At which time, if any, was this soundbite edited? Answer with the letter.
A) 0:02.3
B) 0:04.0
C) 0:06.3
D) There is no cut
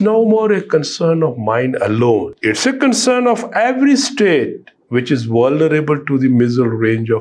A